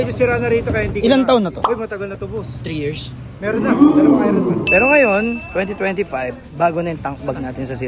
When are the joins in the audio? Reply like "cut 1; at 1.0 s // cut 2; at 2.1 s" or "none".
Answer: cut 1; at 1.6 s // cut 2; at 3.6 s // cut 3; at 4.6 s